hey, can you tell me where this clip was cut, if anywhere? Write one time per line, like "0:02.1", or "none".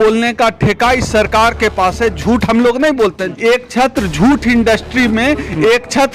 0:03.2